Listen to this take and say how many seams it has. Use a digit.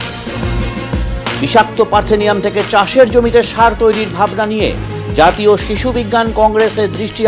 1